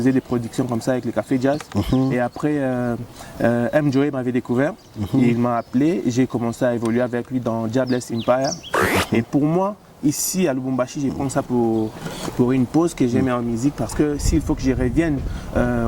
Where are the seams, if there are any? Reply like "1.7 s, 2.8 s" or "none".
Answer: 8.8 s